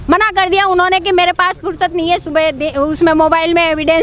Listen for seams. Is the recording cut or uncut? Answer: uncut